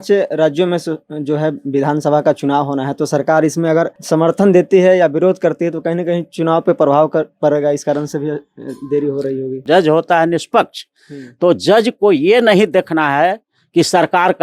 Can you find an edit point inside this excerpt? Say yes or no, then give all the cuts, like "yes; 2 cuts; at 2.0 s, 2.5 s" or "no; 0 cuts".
yes; 2 cuts; at 4.0 s, 9.6 s